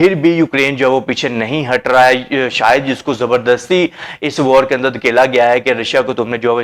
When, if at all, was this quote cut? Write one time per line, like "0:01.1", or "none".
none

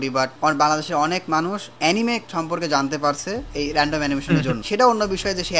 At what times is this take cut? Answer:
0:04.6

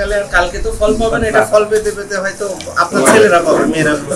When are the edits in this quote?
none

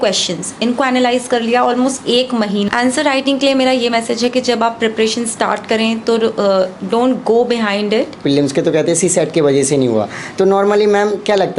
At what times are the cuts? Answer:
0:02.7
0:08.2

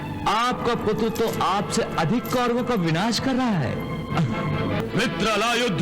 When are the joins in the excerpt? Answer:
0:04.8

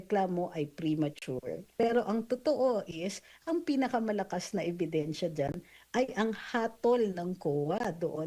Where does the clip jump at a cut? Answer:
0:01.7

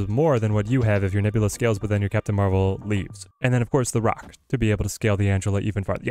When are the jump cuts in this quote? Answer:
0:03.2

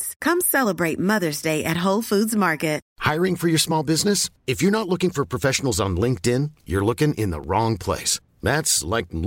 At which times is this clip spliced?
0:02.9

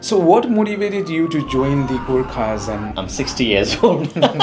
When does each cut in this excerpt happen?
0:03.0

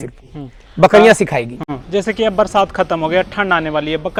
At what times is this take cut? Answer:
none

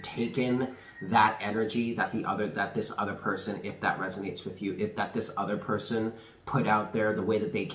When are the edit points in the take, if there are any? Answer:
none

